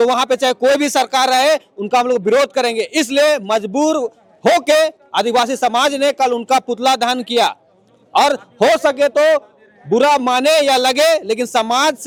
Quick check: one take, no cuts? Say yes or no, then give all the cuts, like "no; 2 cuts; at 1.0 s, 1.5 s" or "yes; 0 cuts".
yes; 0 cuts